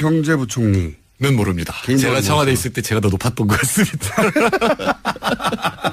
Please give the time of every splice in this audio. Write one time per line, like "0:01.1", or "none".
0:04.0